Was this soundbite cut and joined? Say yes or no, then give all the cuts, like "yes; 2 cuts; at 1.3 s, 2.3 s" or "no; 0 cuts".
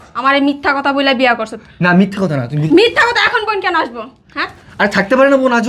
no; 0 cuts